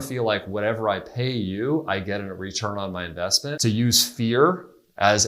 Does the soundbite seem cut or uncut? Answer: cut